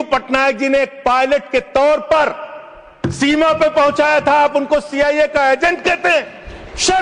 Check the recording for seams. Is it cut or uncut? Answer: uncut